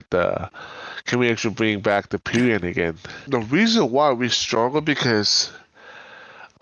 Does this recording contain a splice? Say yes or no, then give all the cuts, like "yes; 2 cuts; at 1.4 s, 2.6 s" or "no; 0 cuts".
yes; 1 cut; at 3.1 s